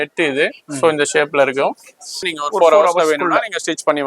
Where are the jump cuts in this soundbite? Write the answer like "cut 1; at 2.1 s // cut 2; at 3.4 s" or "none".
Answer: cut 1; at 2.2 s

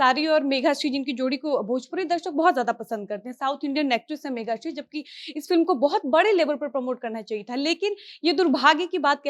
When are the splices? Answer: none

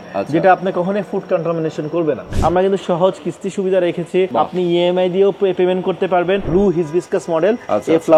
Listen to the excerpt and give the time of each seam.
cut 1; at 2.3 s // cut 2; at 4.3 s // cut 3; at 6.4 s

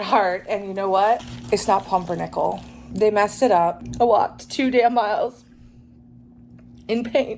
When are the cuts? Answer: cut 1; at 1.3 s // cut 2; at 2.8 s // cut 3; at 3.8 s

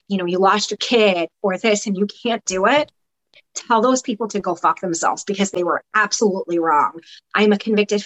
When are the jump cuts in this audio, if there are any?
none

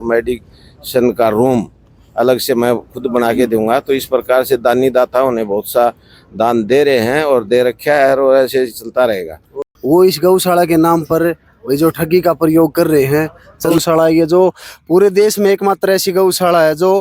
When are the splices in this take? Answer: cut 1; at 9.6 s // cut 2; at 13.7 s

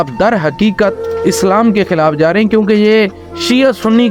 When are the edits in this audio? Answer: none

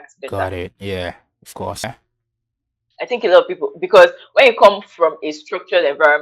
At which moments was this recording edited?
cut 1; at 1.8 s

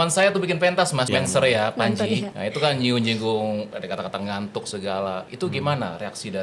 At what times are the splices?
cut 1; at 1.1 s // cut 2; at 2.4 s // cut 3; at 3.8 s // cut 4; at 5.3 s

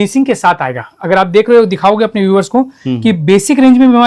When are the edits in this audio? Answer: none

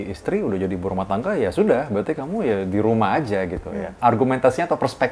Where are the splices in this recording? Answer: cut 1; at 3.9 s

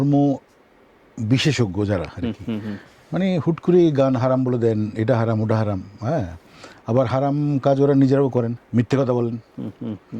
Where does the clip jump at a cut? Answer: cut 1; at 8.6 s

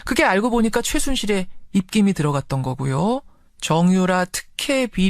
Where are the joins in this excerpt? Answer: cut 1; at 2.7 s

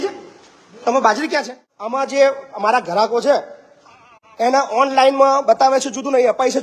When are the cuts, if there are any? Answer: cut 1; at 1.6 s

